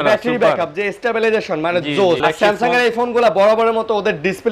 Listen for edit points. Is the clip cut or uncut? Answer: cut